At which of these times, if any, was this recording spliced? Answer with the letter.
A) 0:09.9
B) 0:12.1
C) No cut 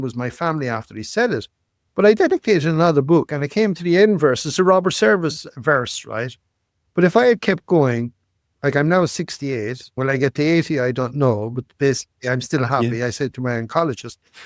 A